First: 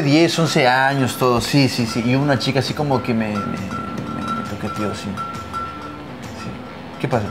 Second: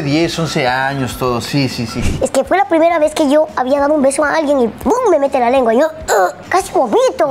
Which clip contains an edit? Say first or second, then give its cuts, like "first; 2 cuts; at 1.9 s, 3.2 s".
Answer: second; 2 cuts; at 2.0 s, 6.4 s